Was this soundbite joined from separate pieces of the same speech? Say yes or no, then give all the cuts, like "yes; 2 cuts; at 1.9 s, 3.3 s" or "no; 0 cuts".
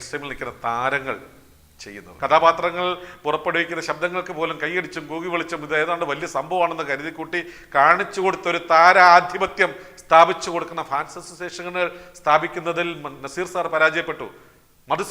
yes; 1 cut; at 2.1 s